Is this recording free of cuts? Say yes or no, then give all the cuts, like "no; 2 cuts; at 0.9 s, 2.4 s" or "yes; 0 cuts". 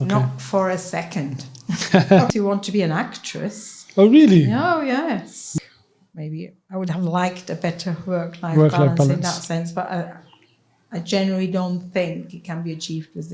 no; 2 cuts; at 2.3 s, 5.5 s